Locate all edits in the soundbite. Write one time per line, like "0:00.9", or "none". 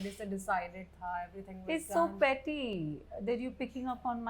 none